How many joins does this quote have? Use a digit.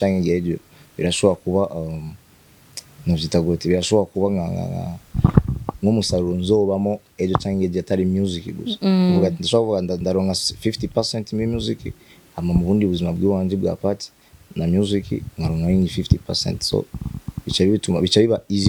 0